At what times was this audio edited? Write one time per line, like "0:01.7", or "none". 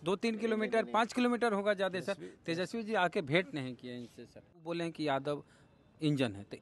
0:04.5